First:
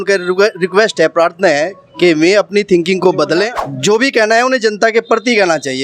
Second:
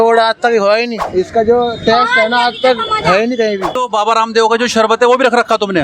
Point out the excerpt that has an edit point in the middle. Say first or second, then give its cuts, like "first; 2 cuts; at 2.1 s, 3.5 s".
second; 2 cuts; at 1.0 s, 3.8 s